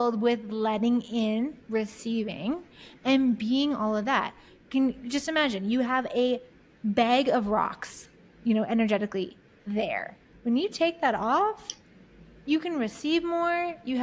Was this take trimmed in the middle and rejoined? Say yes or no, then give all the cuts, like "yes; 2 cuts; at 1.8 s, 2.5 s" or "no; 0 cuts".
no; 0 cuts